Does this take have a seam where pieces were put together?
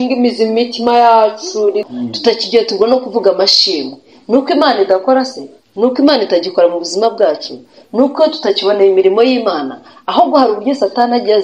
yes; 1 cut; at 1.9 s

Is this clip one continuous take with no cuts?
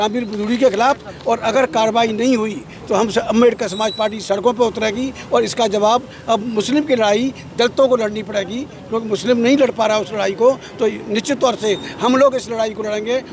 yes; 0 cuts

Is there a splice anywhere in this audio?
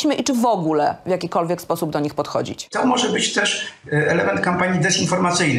yes; 1 cut; at 2.7 s

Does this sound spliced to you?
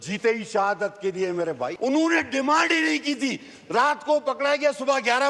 yes; 1 cut; at 1.7 s

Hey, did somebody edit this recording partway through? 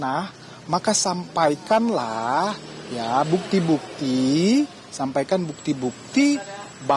no; 0 cuts

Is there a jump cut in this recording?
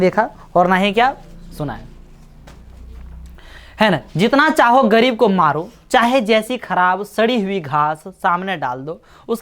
no; 0 cuts

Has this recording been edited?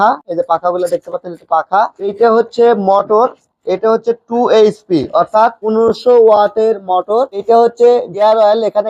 no; 0 cuts

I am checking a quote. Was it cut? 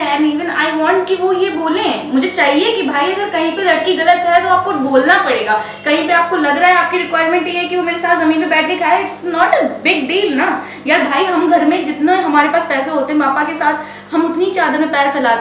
no; 0 cuts

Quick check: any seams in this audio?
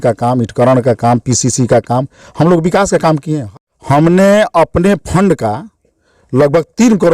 yes; 1 cut; at 3.5 s

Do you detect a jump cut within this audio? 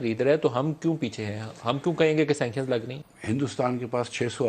yes; 1 cut; at 3.0 s

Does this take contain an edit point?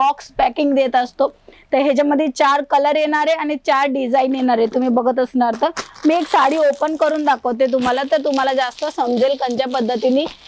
no; 0 cuts

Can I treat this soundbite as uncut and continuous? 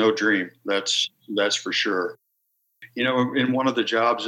no; 1 cut; at 2.3 s

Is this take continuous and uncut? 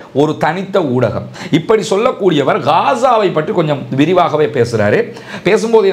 no; 1 cut; at 1.3 s

